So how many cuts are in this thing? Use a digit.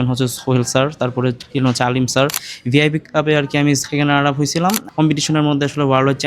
2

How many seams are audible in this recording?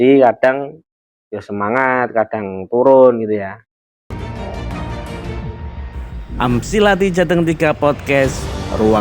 1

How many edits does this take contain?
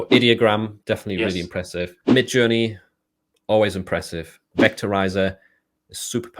2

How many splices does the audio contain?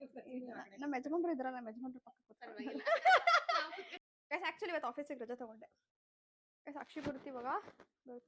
1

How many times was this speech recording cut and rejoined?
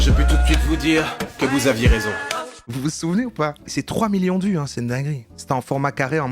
3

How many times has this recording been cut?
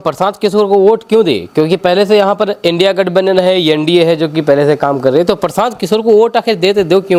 0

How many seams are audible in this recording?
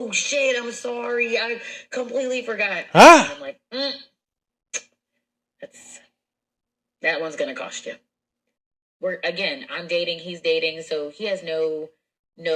1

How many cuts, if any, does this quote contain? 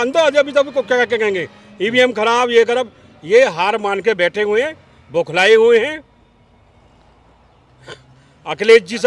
0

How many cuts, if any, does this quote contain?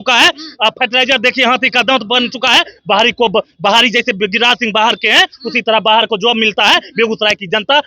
0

